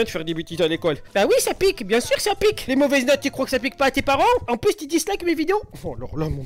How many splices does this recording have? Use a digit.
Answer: 2